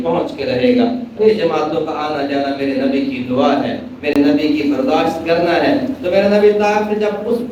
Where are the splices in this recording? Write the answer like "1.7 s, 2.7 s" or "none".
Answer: none